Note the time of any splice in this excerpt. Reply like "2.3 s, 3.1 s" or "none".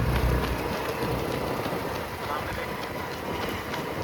none